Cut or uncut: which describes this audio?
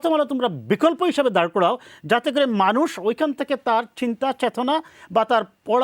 uncut